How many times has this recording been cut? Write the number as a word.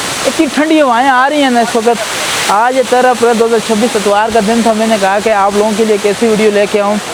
zero